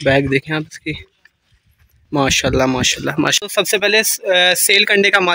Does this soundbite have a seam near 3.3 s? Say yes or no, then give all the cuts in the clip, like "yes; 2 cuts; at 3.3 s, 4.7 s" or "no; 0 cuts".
yes; 1 cut; at 3.3 s